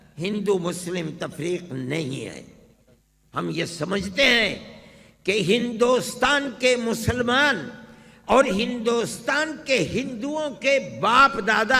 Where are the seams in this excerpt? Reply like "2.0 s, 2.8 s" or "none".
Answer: none